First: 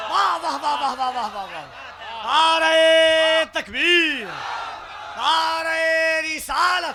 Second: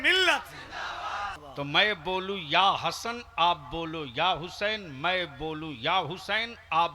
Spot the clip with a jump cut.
second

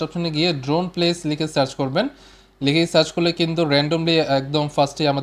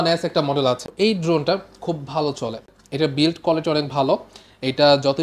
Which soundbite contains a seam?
second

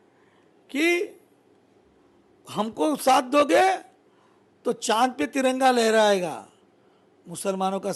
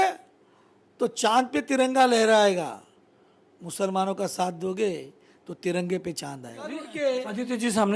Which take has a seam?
second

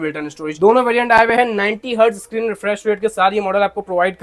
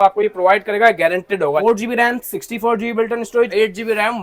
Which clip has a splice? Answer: second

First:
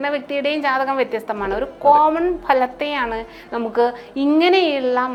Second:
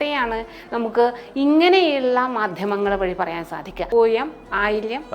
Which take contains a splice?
second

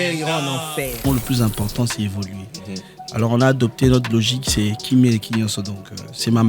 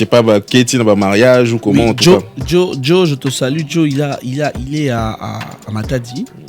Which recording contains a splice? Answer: first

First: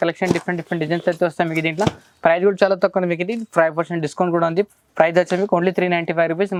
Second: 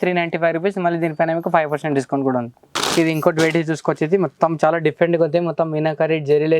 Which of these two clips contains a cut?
second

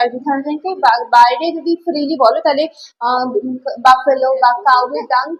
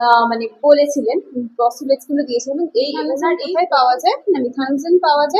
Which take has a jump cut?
second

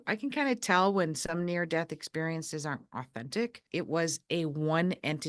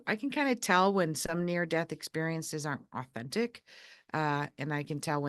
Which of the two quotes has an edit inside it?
first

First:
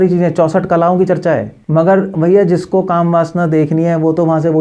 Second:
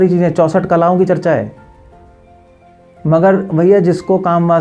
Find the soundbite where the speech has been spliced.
first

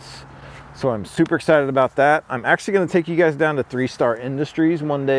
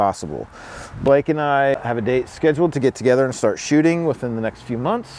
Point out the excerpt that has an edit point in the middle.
second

